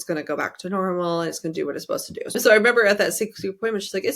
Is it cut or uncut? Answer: cut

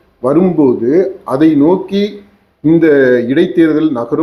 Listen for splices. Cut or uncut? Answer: uncut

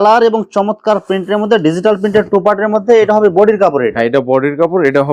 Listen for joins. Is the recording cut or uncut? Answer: uncut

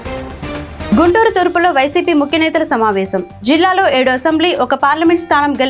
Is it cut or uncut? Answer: cut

